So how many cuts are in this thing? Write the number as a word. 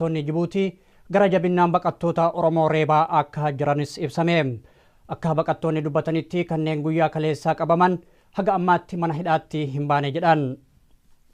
zero